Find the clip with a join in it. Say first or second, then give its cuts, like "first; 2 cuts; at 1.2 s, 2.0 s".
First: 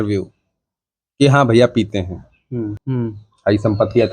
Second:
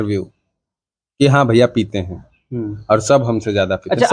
first; 1 cut; at 2.7 s